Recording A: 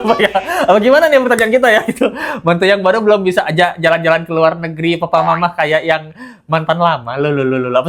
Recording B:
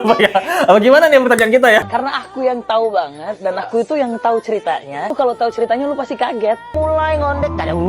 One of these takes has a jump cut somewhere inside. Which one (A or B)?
B